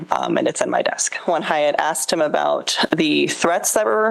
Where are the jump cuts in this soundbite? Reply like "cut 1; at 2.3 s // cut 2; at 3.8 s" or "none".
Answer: cut 1; at 1.2 s

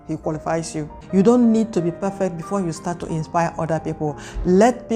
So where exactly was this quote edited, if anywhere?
cut 1; at 1.0 s

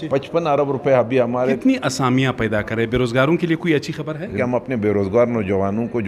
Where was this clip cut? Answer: cut 1; at 1.6 s // cut 2; at 4.4 s

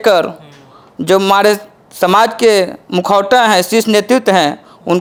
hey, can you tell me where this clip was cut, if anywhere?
none

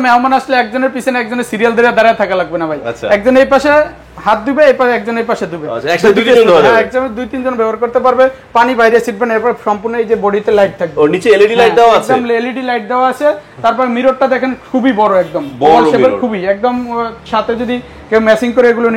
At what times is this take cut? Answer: none

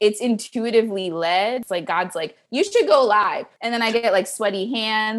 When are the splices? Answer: cut 1; at 1.6 s // cut 2; at 3.5 s

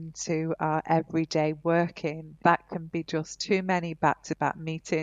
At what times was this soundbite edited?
cut 1; at 2.3 s

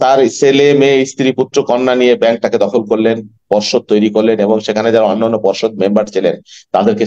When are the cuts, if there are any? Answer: none

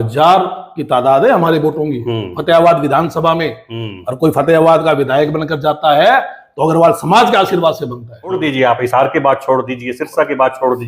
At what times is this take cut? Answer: cut 1; at 8.4 s

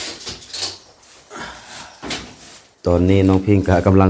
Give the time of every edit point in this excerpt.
cut 1; at 2.9 s

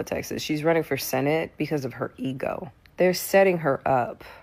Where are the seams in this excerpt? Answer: cut 1; at 2.8 s

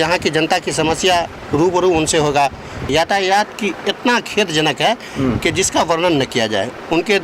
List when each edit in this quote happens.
cut 1; at 2.9 s

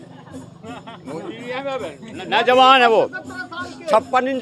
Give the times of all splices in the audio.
none

